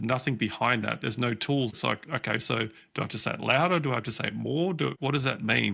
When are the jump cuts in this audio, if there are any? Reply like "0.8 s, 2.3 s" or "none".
1.8 s, 5.0 s